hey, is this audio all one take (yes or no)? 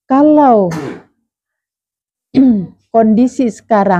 yes